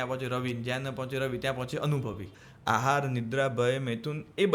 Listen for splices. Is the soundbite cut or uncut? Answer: cut